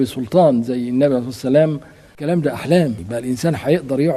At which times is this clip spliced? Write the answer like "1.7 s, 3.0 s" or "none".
2.2 s, 3.1 s